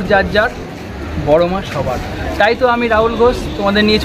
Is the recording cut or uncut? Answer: uncut